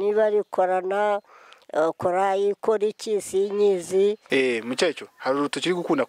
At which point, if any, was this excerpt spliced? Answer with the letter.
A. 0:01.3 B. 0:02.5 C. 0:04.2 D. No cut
C